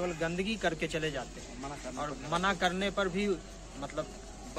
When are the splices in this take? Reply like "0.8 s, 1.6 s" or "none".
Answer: none